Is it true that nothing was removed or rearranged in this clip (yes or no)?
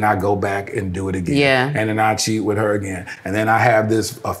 yes